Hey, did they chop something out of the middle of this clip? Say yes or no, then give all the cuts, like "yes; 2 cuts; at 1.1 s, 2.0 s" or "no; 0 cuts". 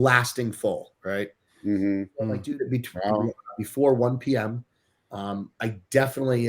yes; 1 cut; at 2.2 s